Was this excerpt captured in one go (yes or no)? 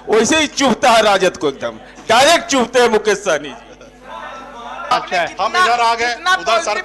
no